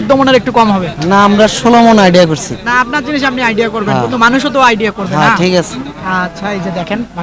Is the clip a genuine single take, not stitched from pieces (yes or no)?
yes